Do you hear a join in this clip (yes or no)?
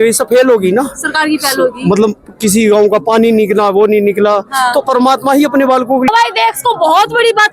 no